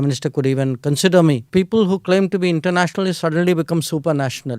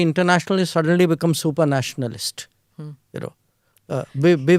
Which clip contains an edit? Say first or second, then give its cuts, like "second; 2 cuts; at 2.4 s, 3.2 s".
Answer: first; 1 cut; at 1.4 s